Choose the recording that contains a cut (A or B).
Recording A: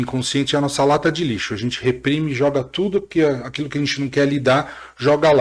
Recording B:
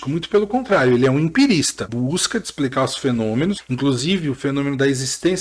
B